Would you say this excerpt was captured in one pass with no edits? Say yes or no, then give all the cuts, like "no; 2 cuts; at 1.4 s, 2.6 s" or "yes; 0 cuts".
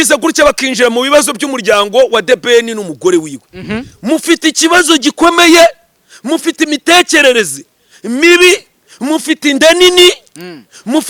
yes; 0 cuts